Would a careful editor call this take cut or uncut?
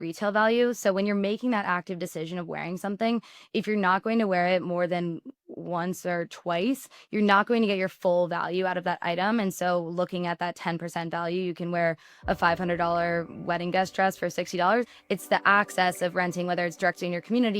cut